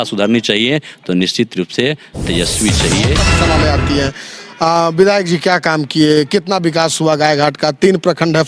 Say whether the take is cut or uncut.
cut